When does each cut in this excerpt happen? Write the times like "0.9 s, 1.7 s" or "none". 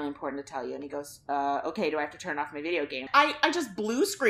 3.1 s